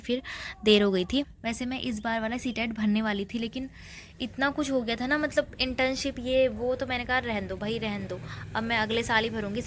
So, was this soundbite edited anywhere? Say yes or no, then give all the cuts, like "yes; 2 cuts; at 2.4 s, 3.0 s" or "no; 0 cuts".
no; 0 cuts